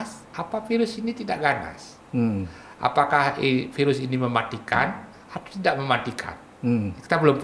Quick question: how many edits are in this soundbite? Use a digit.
0